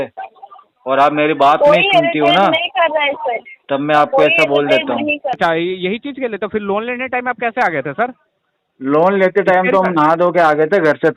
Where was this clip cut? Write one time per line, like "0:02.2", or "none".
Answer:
0:05.4